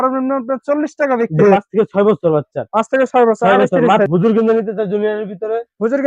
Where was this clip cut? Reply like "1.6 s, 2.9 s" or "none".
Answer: 1.5 s, 4.1 s